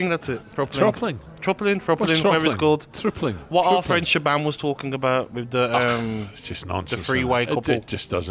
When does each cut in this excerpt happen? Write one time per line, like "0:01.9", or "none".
none